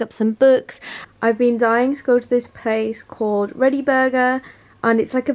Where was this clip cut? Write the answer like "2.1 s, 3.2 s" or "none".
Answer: 0.9 s